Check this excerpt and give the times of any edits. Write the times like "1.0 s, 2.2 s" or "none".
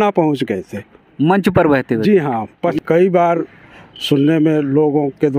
2.7 s